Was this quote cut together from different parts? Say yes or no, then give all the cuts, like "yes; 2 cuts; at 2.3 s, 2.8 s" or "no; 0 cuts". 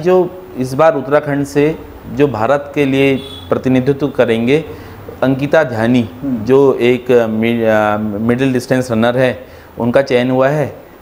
no; 0 cuts